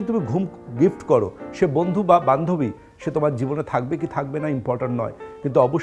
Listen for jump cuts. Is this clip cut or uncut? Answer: uncut